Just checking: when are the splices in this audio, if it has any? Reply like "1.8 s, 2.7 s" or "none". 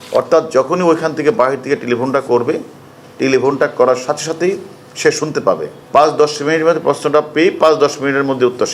5.7 s